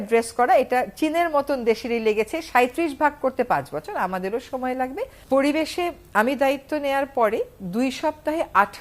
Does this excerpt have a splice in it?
yes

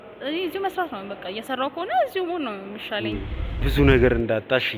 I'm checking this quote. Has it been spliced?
yes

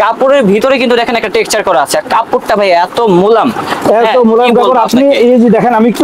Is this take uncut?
yes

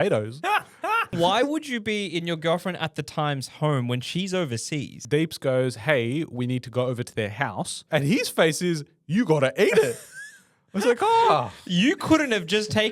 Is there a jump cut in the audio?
yes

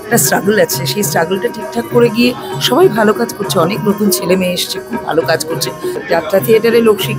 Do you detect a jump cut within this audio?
yes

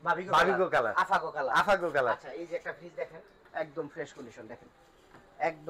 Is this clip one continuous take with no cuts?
yes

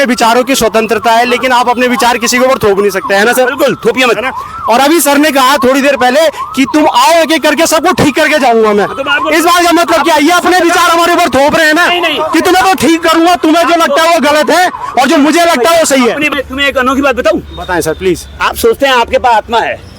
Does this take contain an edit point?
yes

